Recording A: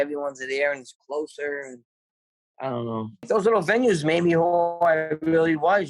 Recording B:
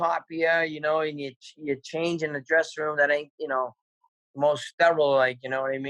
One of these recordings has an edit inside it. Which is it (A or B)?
A